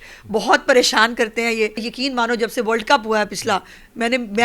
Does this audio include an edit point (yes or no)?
yes